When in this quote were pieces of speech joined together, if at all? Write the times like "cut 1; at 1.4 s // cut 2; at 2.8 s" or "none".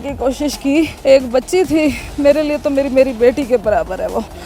cut 1; at 0.9 s